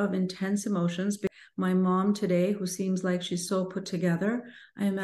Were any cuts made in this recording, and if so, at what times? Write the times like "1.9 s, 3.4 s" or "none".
1.3 s